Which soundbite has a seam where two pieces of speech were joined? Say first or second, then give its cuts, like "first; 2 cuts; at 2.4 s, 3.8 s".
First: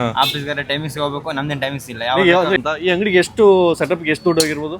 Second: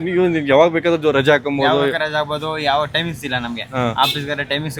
first; 1 cut; at 2.6 s